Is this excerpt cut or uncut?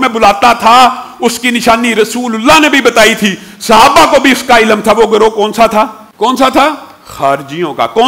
cut